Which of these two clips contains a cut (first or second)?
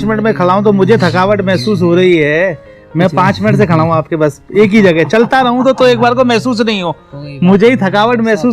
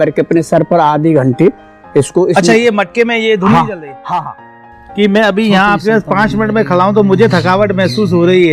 second